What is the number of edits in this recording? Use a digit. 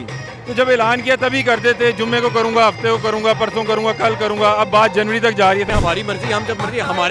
1